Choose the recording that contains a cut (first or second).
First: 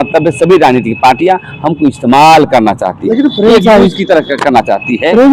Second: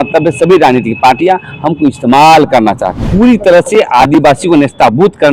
second